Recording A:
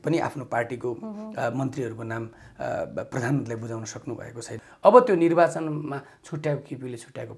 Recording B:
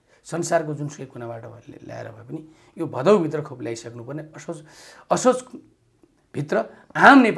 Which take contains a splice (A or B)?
A